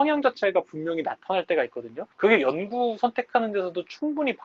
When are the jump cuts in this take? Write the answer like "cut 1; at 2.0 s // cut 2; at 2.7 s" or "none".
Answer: cut 1; at 2.0 s